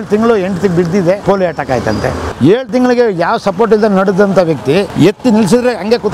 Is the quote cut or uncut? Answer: cut